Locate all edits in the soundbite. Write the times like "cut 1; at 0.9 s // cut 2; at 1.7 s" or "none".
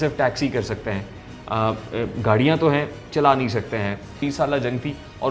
cut 1; at 4.2 s